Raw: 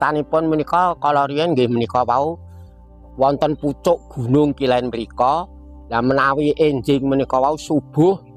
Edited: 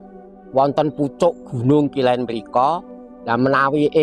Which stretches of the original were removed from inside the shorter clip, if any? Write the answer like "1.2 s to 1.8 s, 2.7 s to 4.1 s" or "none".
none